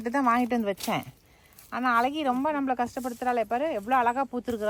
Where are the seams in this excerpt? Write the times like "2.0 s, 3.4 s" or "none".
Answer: none